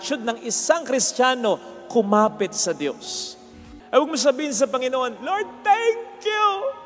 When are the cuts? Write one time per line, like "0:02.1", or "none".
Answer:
0:03.4